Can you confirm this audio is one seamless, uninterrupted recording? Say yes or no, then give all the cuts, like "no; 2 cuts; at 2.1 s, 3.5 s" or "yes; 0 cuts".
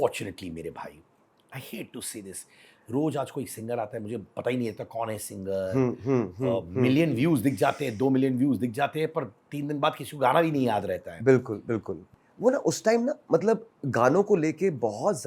no; 1 cut; at 12.0 s